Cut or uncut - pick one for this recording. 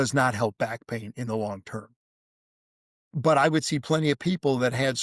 uncut